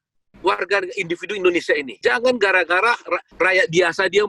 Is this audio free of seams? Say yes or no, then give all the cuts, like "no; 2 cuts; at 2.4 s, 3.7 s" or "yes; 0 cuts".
no; 2 cuts; at 2.0 s, 3.3 s